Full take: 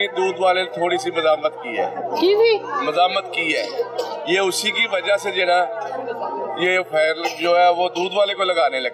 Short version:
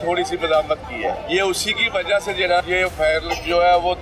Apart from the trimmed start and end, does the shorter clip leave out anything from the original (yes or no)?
yes